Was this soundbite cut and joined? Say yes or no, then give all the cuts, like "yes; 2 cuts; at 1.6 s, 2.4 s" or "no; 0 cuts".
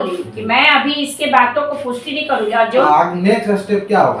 yes; 1 cut; at 2.8 s